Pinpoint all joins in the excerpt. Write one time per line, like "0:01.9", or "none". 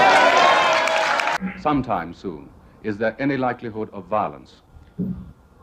0:01.4